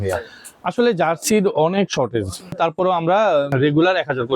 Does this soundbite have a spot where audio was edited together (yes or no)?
yes